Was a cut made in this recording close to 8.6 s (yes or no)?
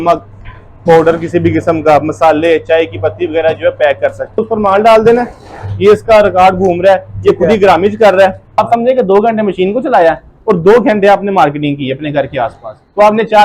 yes